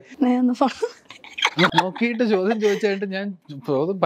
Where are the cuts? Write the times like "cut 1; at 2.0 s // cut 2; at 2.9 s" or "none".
cut 1; at 1.7 s